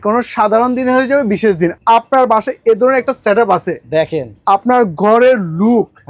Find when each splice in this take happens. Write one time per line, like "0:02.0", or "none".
0:01.8

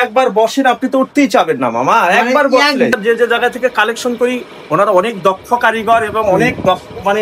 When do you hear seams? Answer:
0:02.9

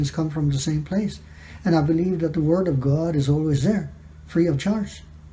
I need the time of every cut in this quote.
none

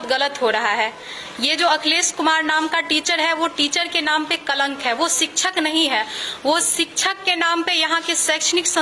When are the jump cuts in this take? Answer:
none

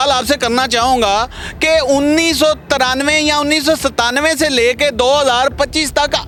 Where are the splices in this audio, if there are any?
none

